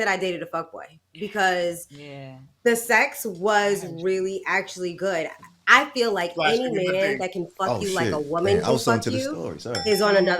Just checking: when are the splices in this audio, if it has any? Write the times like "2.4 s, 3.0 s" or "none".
5.4 s